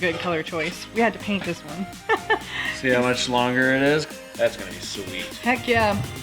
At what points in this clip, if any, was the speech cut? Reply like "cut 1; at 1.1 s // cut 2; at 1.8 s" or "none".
cut 1; at 4.1 s